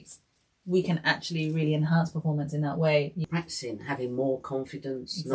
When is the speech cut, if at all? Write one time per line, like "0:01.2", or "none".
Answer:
0:03.3

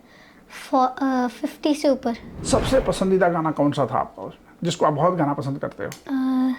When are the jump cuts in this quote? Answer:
0:02.3

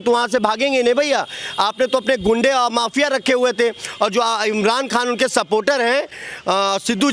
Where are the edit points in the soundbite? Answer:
none

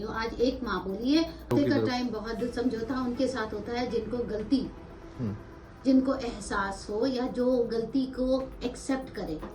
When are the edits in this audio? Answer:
0:01.5

